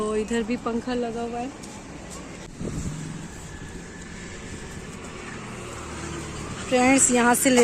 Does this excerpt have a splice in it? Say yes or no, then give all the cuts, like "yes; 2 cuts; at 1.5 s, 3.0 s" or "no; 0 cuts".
yes; 1 cut; at 2.5 s